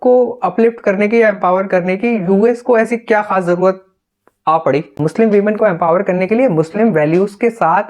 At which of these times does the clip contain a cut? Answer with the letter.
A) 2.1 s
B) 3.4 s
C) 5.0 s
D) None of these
C